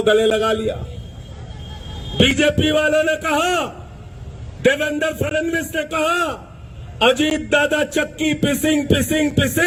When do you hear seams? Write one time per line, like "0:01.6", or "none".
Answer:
none